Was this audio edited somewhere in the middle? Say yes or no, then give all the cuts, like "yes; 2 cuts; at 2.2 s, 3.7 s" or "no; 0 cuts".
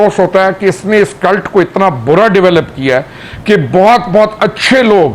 no; 0 cuts